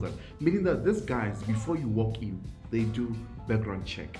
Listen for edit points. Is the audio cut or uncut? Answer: uncut